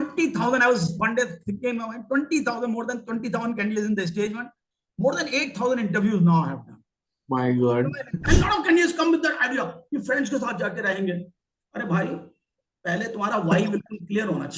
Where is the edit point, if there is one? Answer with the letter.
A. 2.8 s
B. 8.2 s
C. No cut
B